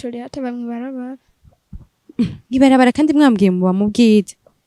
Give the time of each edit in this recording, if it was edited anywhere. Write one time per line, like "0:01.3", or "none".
none